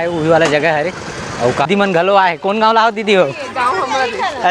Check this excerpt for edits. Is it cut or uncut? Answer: cut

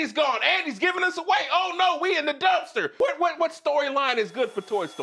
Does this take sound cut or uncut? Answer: cut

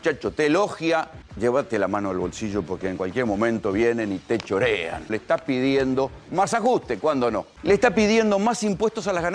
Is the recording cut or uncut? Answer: cut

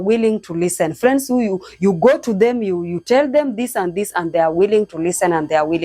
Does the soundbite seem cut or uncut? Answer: uncut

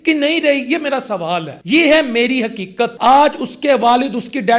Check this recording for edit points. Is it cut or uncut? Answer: cut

